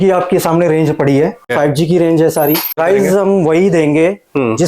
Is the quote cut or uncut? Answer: cut